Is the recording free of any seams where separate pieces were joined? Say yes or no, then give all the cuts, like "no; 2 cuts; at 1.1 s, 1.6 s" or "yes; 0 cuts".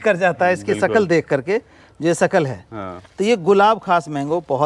yes; 0 cuts